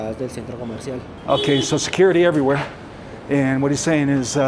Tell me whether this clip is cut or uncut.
cut